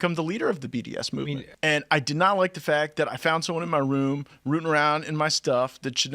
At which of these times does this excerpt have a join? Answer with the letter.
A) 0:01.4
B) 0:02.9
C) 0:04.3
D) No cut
A